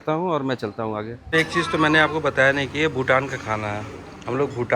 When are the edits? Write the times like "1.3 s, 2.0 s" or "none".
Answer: 1.1 s

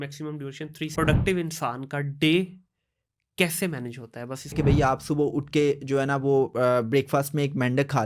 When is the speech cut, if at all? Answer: 0.9 s, 4.5 s

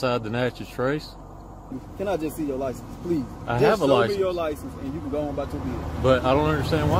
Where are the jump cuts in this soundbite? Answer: 1.6 s

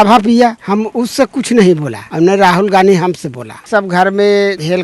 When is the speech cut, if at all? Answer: 2.0 s, 3.7 s

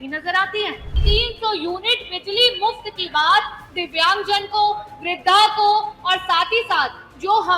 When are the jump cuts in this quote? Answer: 1.0 s

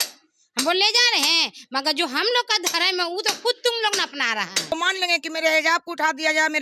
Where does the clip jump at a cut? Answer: 4.7 s

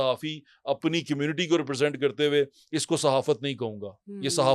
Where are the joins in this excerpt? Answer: none

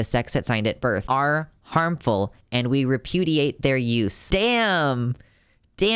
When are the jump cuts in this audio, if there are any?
1.0 s, 4.2 s

